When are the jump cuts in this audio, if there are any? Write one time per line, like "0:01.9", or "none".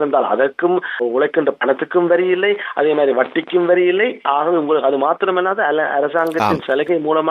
0:01.0